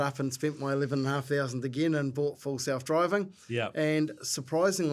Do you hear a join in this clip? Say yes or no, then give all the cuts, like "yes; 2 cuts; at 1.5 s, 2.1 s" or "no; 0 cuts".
no; 0 cuts